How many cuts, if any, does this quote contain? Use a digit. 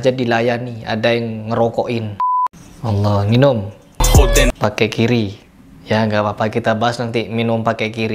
1